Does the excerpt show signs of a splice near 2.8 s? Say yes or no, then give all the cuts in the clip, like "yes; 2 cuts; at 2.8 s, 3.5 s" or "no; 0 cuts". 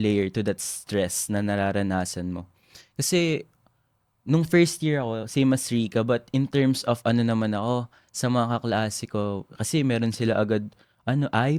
no; 0 cuts